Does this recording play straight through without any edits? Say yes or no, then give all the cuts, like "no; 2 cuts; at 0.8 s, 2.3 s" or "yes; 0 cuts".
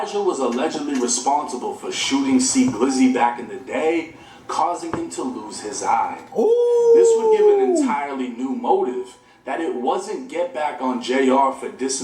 yes; 0 cuts